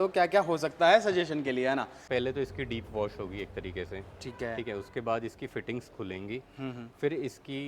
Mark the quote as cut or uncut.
cut